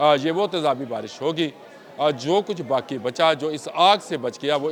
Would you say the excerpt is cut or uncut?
uncut